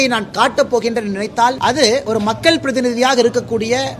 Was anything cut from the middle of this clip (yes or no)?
yes